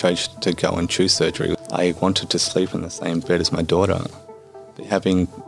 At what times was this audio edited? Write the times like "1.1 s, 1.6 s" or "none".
1.6 s